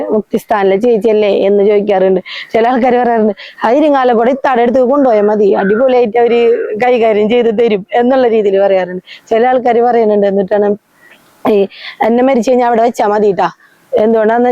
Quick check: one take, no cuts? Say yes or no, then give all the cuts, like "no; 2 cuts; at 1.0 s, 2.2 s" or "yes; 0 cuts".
yes; 0 cuts